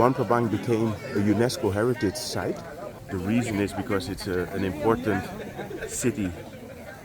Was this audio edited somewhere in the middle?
yes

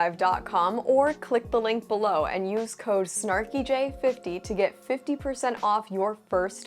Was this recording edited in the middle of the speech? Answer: no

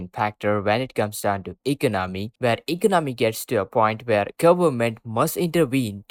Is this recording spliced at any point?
no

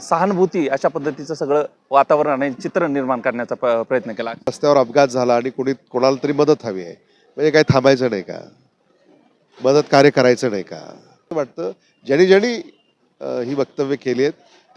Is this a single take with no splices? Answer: no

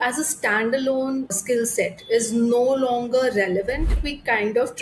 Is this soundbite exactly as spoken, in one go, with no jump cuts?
no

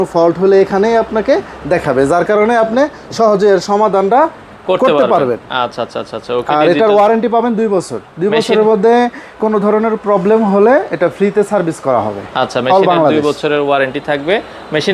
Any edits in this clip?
no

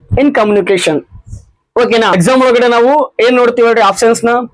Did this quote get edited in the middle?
yes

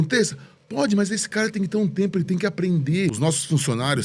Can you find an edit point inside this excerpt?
yes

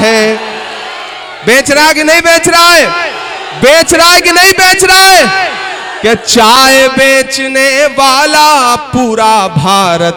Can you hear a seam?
no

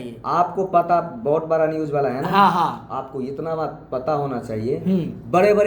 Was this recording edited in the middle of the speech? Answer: no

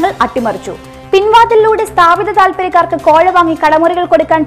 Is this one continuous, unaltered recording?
yes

